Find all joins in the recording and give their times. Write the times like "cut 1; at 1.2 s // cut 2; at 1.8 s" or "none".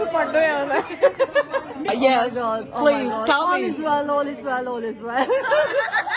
cut 1; at 1.9 s